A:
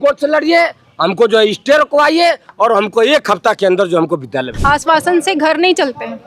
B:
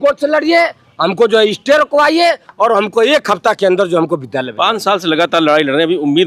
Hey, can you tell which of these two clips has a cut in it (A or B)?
A